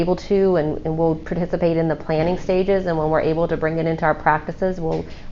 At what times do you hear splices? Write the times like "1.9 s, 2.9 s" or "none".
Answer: none